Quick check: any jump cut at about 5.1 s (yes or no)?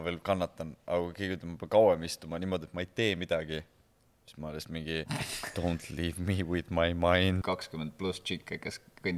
yes